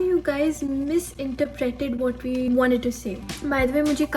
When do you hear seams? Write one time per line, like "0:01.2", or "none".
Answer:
0:02.5
0:03.2